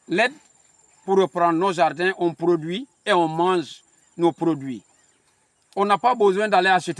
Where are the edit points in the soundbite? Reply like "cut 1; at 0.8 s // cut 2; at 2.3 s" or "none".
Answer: none